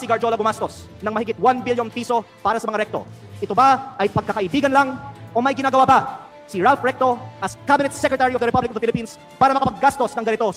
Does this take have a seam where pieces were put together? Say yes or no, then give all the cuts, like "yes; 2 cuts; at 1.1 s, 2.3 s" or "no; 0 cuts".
no; 0 cuts